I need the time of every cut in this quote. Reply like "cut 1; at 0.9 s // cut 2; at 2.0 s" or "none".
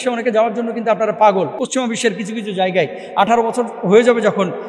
cut 1; at 1.6 s